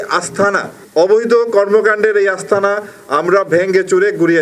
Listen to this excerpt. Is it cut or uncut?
uncut